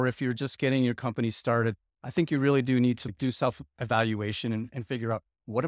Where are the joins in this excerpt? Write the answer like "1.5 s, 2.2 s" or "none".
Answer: 3.1 s